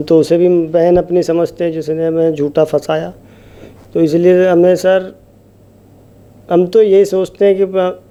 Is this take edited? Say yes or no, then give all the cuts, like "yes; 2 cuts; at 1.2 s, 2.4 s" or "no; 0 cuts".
no; 0 cuts